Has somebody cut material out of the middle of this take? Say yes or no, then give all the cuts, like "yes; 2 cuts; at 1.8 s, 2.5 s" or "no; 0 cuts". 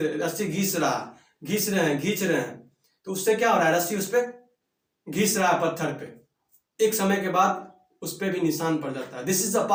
no; 0 cuts